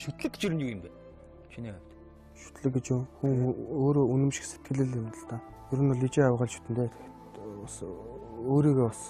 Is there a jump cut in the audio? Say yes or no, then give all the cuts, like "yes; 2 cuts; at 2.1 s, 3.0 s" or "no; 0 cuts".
no; 0 cuts